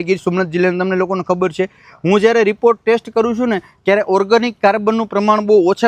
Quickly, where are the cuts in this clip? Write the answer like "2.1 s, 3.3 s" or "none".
none